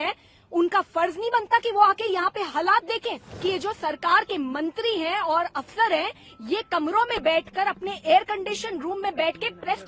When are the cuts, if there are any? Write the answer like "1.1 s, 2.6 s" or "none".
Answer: 3.3 s